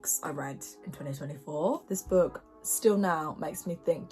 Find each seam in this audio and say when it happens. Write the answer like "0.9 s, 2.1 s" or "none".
1.8 s